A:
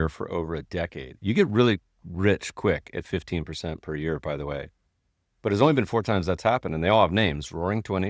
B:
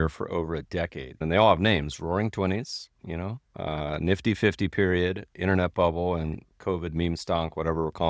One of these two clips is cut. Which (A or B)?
B